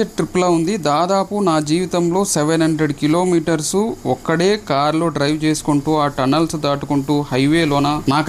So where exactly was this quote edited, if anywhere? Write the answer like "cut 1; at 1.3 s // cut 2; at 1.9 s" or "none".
none